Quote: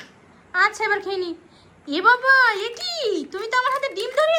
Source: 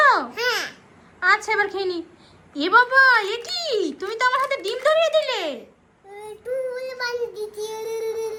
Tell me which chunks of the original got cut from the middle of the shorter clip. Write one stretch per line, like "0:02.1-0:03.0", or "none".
none